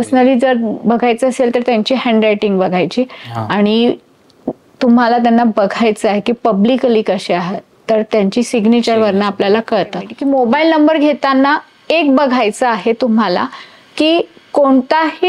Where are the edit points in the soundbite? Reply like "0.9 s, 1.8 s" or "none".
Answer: 10.1 s